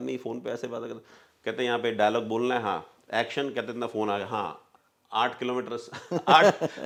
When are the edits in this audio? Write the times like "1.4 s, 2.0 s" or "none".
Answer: none

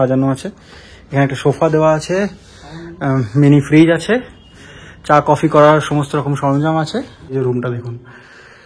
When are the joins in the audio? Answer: 7.3 s

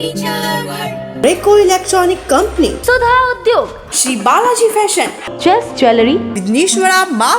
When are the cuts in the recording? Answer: 1.1 s

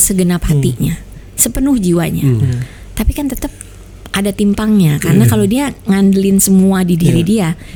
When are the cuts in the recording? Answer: none

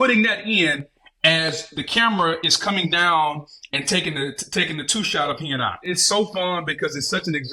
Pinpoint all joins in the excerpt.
5.9 s

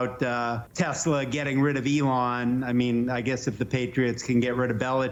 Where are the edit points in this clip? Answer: none

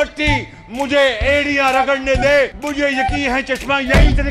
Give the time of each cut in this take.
2.6 s

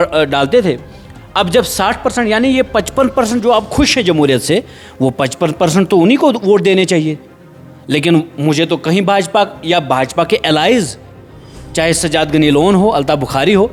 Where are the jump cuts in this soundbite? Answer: none

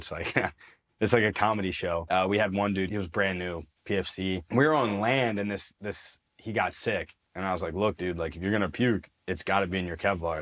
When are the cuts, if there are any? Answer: 2.0 s, 2.9 s, 4.4 s, 7.2 s

